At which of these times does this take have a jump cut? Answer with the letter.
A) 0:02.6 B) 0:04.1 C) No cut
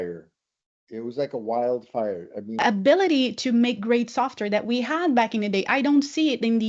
A